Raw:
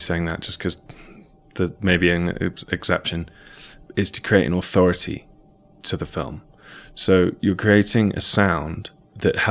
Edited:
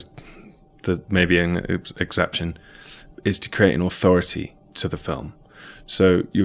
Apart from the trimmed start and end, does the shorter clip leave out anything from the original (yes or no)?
yes